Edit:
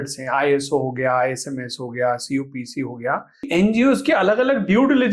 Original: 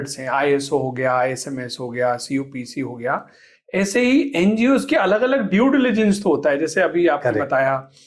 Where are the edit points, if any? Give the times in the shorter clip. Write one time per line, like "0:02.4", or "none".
0:03.5